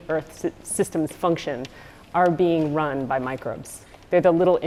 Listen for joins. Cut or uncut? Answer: uncut